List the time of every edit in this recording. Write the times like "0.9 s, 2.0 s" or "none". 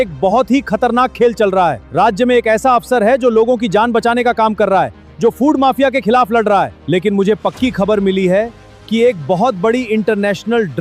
1.8 s, 6.8 s